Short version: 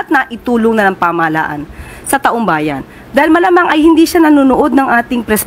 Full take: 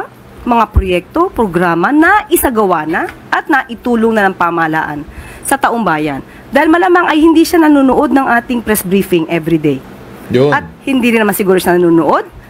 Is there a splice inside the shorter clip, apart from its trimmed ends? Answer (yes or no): no